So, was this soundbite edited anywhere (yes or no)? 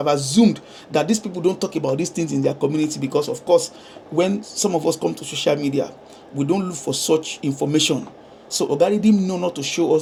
no